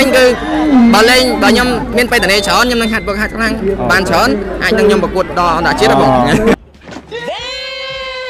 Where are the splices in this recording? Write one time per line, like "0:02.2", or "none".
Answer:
none